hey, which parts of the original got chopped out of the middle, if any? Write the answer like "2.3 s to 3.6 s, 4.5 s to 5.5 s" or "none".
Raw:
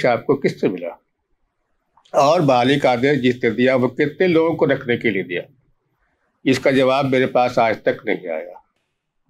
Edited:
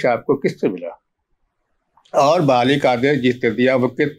none